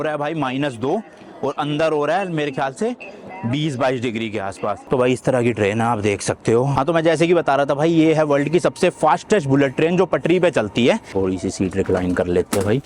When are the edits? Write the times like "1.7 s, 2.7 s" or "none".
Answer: 4.8 s, 6.7 s, 11.1 s